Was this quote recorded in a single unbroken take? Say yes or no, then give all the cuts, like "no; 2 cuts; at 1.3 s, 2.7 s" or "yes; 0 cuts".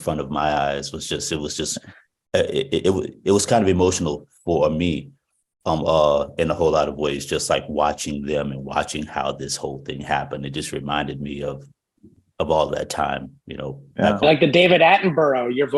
yes; 0 cuts